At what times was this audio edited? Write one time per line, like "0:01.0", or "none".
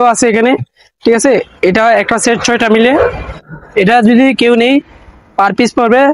none